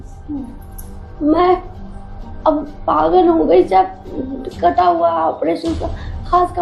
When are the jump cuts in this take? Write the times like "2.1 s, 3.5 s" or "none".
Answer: none